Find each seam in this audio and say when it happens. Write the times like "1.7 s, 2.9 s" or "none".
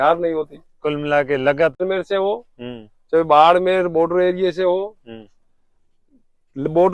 1.8 s